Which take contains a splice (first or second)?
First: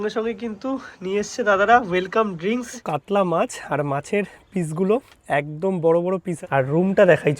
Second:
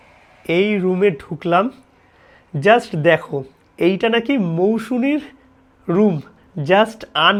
first